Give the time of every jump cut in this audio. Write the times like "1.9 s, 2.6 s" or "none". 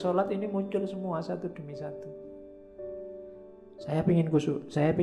2.0 s, 3.9 s

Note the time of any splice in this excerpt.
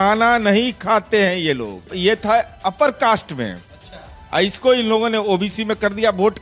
1.9 s

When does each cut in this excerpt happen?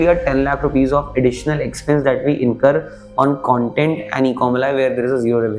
none

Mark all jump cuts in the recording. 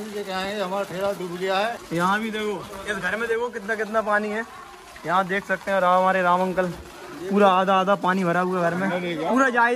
1.8 s

